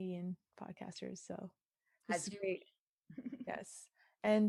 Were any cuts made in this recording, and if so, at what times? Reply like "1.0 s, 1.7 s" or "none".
none